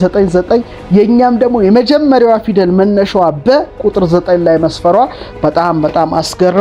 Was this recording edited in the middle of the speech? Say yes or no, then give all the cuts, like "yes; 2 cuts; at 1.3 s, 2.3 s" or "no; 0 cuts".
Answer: no; 0 cuts